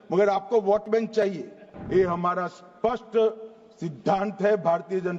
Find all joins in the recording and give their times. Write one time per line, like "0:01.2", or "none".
0:01.7